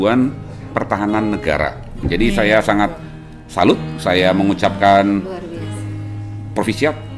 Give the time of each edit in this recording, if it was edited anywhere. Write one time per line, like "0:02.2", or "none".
0:02.0